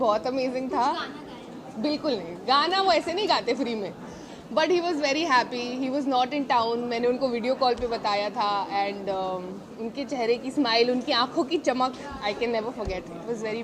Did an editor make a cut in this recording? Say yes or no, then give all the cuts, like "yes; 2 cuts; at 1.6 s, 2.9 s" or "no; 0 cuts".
no; 0 cuts